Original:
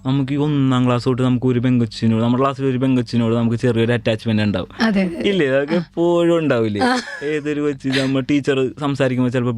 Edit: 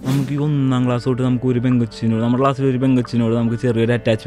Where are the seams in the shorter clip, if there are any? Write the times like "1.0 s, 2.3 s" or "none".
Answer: none